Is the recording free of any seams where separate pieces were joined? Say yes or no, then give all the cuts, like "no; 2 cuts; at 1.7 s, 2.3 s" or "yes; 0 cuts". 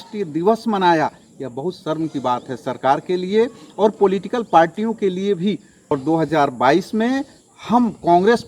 no; 1 cut; at 5.9 s